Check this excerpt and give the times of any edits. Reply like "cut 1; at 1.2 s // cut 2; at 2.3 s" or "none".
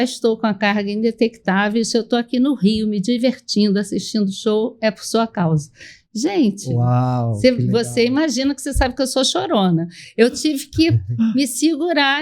none